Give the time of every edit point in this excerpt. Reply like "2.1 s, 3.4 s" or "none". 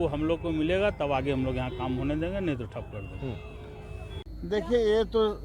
4.1 s